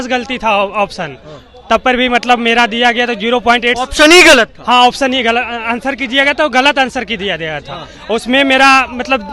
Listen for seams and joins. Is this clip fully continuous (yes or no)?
yes